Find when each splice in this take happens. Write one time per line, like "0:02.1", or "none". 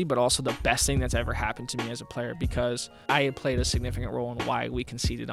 0:03.0